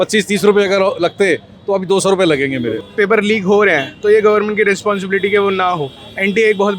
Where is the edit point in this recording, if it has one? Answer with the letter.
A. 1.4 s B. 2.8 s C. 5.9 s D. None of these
B